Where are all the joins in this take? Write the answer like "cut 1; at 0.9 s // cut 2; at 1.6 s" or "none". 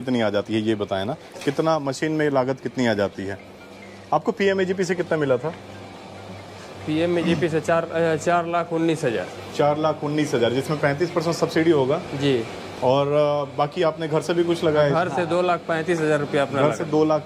none

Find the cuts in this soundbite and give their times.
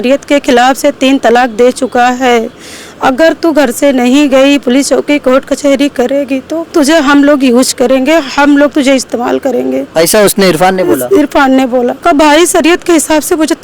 cut 1; at 6.6 s // cut 2; at 9.9 s // cut 3; at 12.0 s

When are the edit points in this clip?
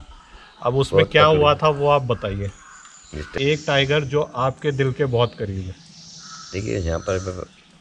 cut 1; at 3.3 s

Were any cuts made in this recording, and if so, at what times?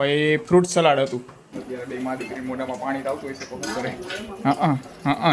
cut 1; at 1.5 s

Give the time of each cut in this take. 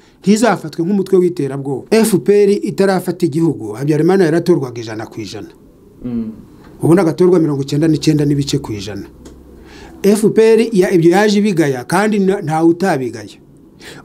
cut 1; at 1.8 s

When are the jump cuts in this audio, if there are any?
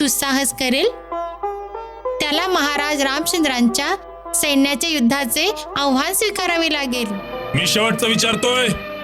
cut 1; at 7.3 s

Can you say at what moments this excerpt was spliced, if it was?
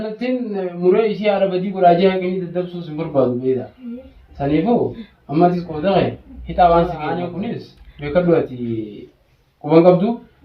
cut 1; at 7.4 s

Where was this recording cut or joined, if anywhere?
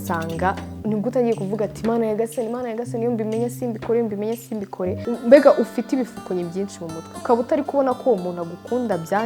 cut 1; at 5.0 s

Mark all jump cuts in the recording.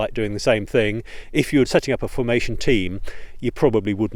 cut 1; at 1.7 s

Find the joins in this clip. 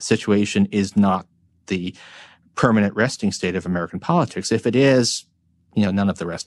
none

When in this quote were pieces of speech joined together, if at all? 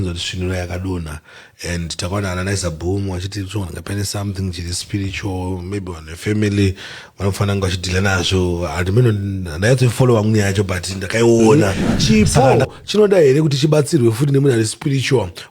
cut 1; at 11.5 s

